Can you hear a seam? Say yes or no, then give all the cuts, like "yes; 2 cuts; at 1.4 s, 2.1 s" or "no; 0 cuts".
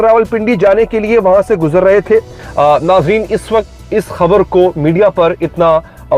yes; 1 cut; at 2.4 s